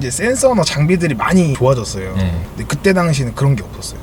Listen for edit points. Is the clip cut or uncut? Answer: cut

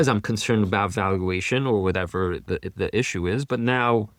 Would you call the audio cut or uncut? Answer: uncut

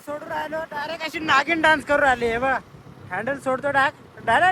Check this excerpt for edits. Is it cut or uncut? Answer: uncut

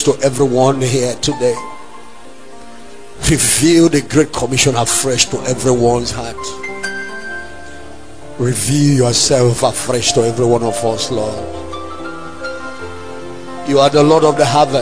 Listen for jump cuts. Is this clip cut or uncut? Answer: uncut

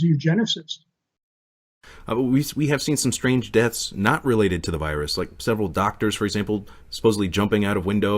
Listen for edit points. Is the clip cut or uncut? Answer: cut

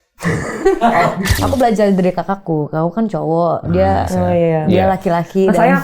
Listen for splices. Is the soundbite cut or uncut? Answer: cut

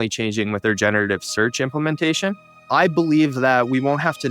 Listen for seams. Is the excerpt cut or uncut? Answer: cut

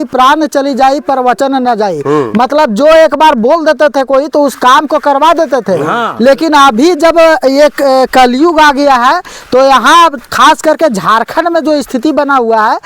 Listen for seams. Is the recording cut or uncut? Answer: uncut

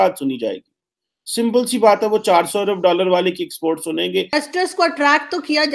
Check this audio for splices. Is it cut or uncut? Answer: cut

